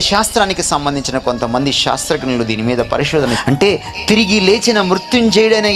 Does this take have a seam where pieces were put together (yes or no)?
yes